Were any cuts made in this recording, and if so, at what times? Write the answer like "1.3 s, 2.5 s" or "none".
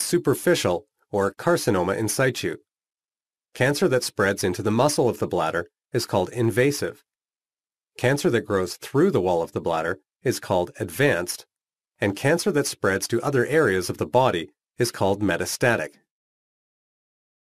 4.9 s